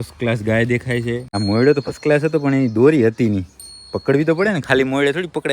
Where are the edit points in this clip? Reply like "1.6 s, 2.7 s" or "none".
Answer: 1.3 s